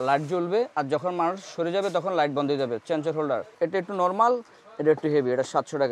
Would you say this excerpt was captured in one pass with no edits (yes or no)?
no